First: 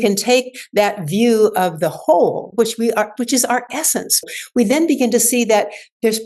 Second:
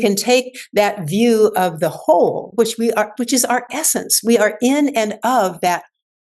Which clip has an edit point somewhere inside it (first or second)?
first